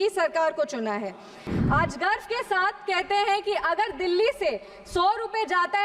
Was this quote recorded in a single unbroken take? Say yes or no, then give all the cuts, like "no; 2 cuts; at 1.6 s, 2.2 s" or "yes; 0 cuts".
no; 1 cut; at 1.5 s